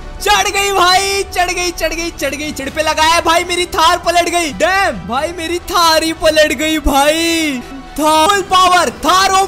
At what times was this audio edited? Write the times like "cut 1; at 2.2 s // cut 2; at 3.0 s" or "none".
cut 1; at 2.6 s // cut 2; at 8.3 s